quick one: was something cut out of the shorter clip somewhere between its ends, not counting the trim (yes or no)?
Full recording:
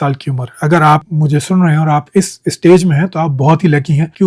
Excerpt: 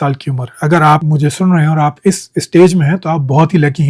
yes